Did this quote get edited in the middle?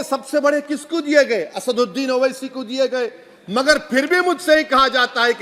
no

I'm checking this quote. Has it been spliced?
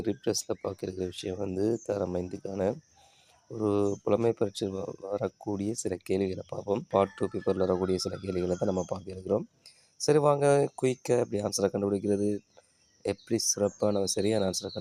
yes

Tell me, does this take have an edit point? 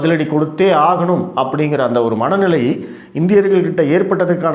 no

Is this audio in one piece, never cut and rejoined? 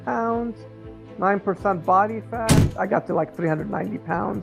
no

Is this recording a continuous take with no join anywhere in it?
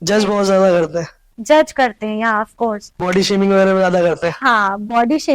no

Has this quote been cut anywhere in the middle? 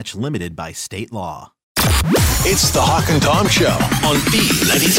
yes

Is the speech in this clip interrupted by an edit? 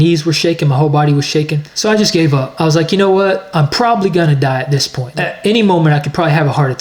yes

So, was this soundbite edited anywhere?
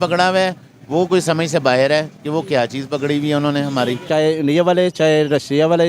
yes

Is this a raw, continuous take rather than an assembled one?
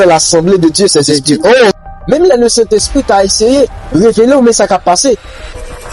no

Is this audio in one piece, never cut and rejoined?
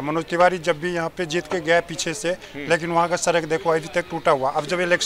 yes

